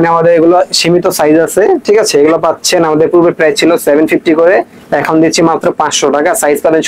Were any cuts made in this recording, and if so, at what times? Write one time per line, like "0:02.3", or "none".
none